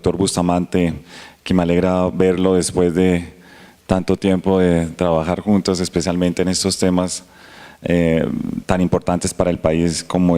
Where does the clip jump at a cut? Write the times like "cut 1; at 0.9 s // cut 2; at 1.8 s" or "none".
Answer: none